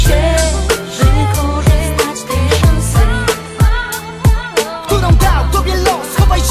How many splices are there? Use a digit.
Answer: 0